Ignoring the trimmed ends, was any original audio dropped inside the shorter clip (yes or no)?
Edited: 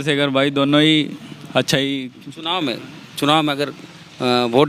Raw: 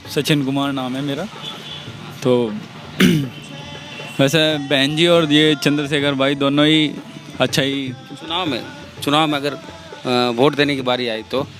no